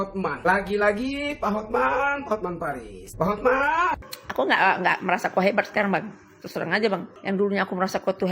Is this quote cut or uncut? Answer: cut